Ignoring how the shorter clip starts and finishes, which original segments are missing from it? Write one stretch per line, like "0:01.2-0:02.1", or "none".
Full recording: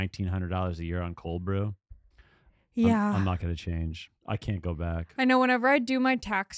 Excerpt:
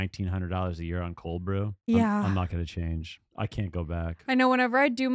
0:01.8-0:02.7